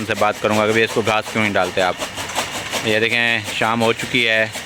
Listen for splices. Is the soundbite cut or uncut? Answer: uncut